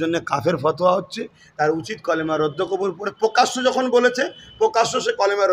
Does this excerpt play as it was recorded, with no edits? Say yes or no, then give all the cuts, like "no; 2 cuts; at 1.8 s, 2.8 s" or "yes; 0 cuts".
yes; 0 cuts